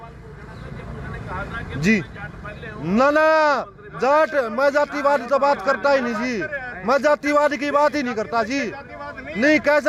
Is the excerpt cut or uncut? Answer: uncut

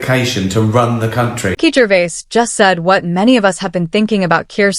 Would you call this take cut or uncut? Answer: cut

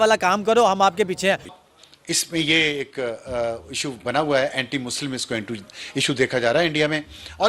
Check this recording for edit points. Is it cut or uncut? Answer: uncut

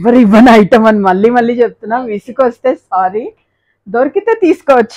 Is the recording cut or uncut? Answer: uncut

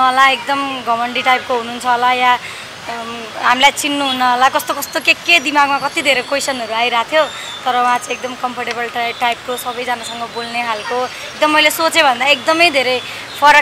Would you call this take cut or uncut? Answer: uncut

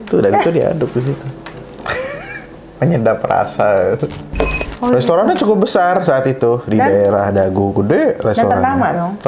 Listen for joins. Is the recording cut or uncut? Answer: cut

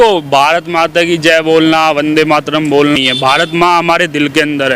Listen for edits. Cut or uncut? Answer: cut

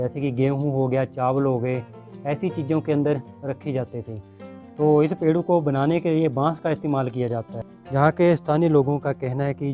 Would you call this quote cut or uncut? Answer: cut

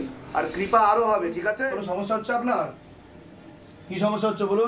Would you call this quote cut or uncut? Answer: cut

